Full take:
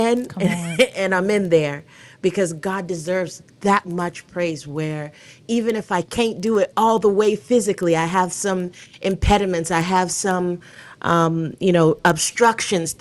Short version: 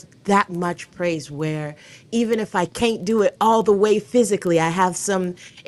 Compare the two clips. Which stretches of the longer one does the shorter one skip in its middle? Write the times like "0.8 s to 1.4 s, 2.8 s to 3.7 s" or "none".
none